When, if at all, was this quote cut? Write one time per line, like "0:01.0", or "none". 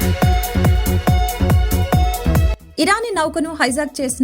0:02.4